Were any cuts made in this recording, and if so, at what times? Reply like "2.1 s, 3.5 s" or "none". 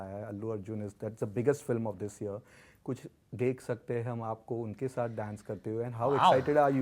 none